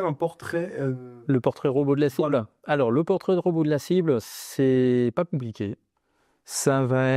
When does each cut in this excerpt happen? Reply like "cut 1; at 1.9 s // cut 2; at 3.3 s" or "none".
none